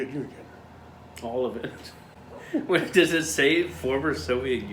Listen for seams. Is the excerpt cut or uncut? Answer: uncut